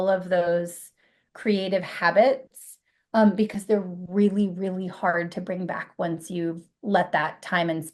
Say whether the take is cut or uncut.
cut